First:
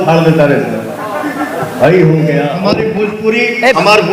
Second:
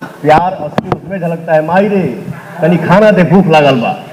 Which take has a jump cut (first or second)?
first